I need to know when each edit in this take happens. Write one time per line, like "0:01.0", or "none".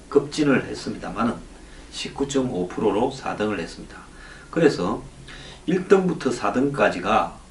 none